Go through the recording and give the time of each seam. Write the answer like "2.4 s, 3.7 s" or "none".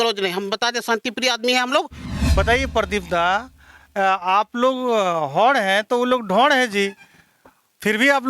2.0 s